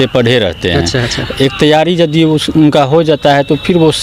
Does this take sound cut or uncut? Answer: uncut